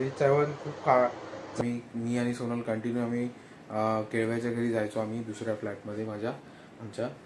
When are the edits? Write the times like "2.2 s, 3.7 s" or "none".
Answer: 1.6 s